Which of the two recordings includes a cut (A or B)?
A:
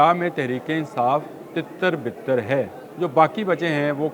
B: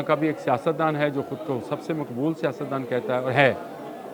A